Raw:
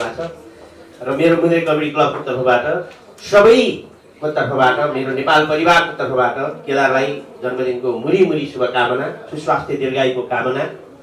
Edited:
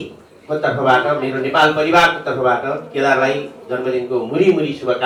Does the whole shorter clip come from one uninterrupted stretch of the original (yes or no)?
yes